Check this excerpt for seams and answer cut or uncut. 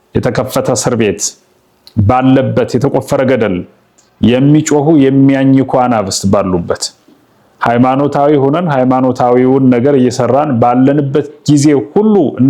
uncut